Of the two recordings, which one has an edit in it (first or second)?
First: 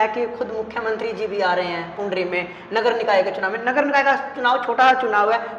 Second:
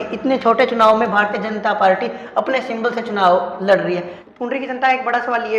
second